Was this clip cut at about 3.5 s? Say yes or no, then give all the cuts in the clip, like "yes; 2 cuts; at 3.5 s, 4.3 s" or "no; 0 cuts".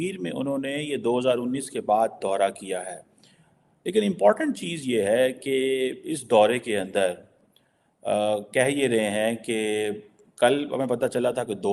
no; 0 cuts